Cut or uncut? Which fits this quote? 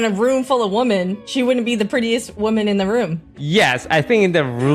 cut